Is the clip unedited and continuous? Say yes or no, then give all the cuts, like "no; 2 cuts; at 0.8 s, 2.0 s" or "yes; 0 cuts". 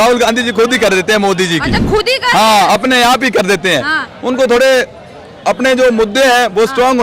yes; 0 cuts